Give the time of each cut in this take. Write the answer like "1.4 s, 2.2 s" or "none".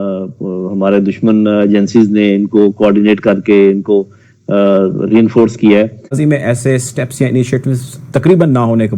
6.1 s